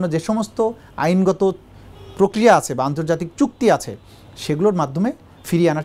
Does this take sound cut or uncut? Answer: uncut